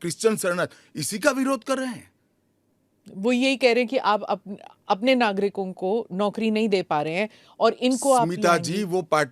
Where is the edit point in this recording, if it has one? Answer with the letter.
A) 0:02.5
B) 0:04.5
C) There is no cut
C